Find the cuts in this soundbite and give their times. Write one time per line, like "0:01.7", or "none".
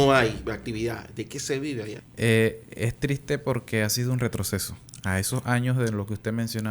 0:02.0